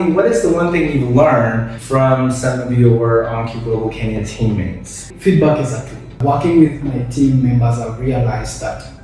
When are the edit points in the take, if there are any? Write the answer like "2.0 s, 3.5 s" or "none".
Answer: 1.7 s, 5.0 s, 6.1 s